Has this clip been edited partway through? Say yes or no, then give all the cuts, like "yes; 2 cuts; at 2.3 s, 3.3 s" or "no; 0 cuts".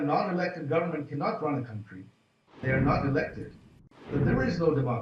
yes; 2 cuts; at 2.6 s, 4.0 s